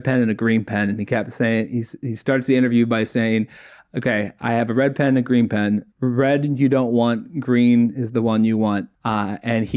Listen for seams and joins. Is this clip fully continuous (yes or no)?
yes